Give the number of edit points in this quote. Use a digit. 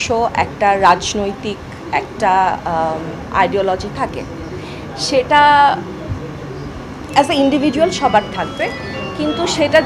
0